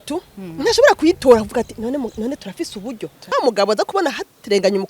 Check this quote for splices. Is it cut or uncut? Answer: cut